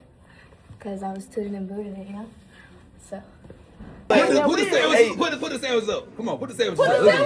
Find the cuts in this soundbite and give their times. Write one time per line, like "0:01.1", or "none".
0:04.1